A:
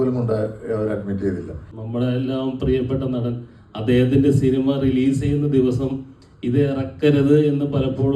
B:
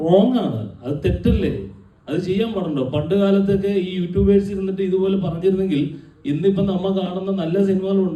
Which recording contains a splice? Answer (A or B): A